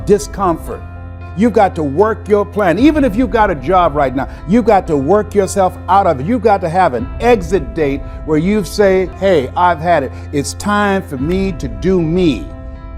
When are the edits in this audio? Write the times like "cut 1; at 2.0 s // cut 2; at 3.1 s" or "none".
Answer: cut 1; at 1.2 s